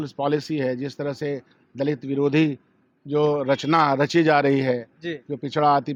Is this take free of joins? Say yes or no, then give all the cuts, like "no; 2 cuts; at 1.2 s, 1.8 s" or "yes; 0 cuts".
yes; 0 cuts